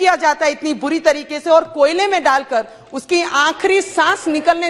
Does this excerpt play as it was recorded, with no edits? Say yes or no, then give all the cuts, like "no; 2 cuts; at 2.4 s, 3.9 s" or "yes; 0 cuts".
yes; 0 cuts